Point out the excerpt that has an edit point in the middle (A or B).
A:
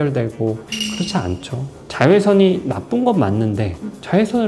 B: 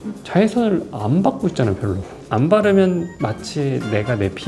B